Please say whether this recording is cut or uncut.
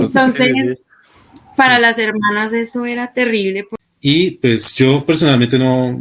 cut